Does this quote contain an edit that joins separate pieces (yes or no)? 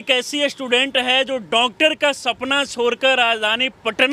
no